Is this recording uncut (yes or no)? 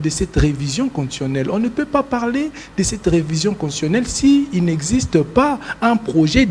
yes